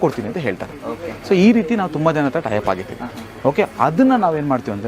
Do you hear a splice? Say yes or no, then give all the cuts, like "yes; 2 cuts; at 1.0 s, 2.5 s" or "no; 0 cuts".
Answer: no; 0 cuts